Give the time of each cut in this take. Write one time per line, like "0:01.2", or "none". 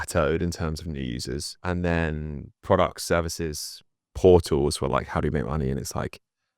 0:01.6